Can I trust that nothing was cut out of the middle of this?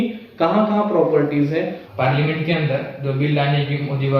no; 1 cut; at 1.8 s

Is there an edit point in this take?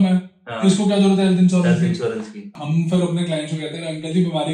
yes; 1 cut; at 2.5 s

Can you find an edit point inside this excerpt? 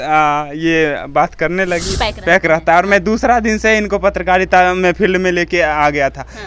yes; 1 cut; at 1.9 s

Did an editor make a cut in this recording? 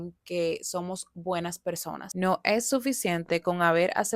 yes; 1 cut; at 2.1 s

